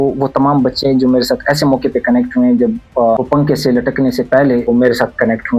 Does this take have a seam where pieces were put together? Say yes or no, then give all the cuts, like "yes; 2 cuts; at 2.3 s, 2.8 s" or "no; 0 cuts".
yes; 2 cuts; at 3.2 s, 4.6 s